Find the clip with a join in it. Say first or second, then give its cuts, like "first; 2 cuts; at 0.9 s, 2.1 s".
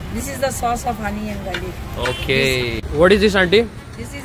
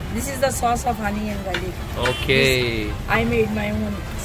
first; 1 cut; at 2.8 s